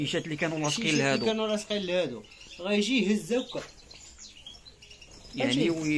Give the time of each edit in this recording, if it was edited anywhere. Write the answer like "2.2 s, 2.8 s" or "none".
none